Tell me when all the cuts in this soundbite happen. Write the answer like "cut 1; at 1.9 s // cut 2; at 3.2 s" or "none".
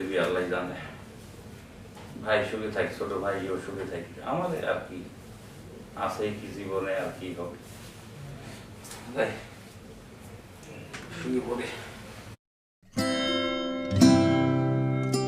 none